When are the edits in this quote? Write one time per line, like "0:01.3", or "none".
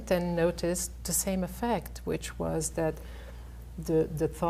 none